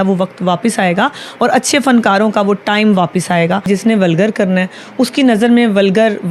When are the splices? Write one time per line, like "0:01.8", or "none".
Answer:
0:03.6